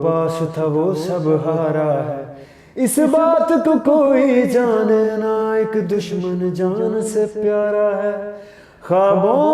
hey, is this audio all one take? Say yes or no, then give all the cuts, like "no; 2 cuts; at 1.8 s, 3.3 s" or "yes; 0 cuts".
yes; 0 cuts